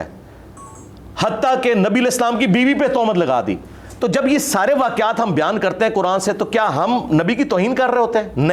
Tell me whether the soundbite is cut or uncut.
uncut